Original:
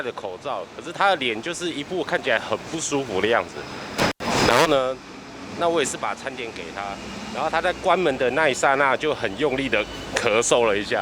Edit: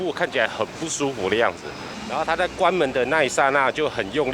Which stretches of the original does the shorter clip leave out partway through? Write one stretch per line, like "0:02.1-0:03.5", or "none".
0:03.8-0:07.1